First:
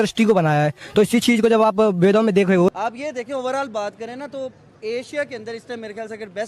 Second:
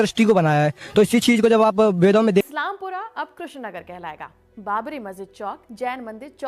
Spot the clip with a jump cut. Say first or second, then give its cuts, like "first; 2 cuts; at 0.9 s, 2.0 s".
second; 1 cut; at 2.4 s